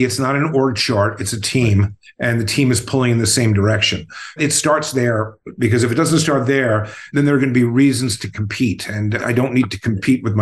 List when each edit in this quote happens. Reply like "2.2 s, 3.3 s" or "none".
4.3 s, 9.2 s